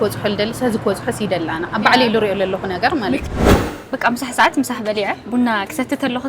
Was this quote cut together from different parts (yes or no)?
yes